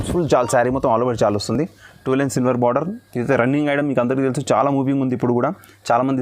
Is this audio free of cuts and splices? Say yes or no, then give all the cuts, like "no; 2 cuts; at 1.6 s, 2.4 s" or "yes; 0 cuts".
yes; 0 cuts